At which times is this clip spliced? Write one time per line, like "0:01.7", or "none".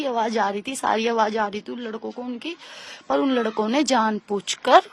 none